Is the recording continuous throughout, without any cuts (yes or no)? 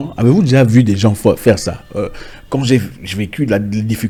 yes